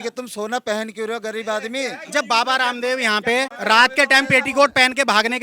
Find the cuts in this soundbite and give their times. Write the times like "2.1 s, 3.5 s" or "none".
2.0 s, 3.5 s